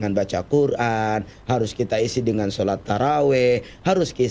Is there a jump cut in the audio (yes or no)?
no